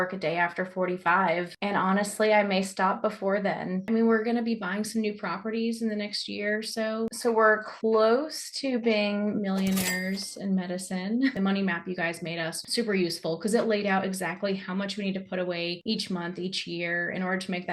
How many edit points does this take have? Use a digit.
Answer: 4